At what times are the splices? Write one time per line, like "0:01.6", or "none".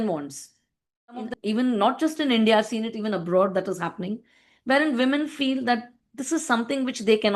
0:01.4